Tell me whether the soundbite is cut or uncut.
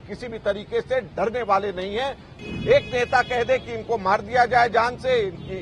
cut